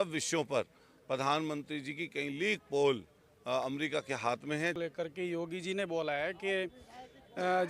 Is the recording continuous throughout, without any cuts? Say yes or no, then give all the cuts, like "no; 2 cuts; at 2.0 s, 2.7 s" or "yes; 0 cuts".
no; 1 cut; at 4.8 s